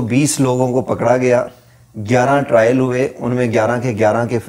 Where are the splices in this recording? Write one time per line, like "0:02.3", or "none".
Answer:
none